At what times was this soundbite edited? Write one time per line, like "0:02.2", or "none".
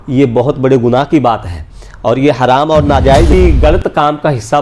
0:03.3